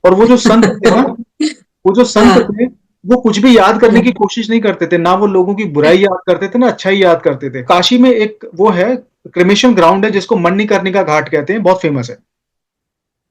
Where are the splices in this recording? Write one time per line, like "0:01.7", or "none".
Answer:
0:07.6